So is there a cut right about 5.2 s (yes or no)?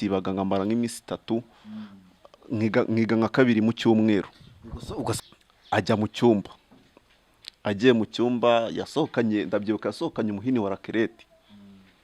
yes